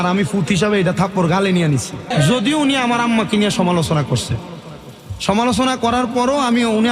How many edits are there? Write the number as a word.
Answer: one